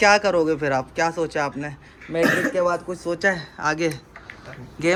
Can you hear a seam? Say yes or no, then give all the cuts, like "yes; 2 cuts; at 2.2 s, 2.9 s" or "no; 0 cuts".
no; 0 cuts